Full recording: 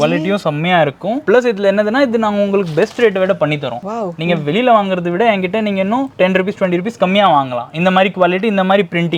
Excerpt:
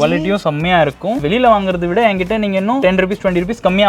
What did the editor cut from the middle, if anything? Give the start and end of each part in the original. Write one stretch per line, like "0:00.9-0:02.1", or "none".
0:01.2-0:04.4
0:06.0-0:06.2